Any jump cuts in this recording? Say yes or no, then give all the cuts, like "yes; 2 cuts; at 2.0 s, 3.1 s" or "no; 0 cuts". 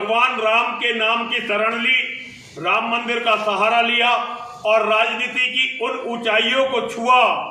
no; 0 cuts